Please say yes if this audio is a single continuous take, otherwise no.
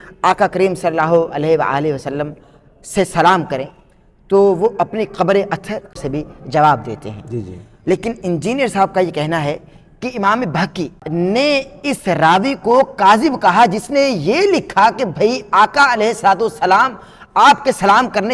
no